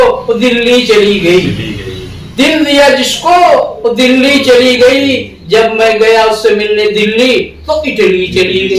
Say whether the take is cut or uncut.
uncut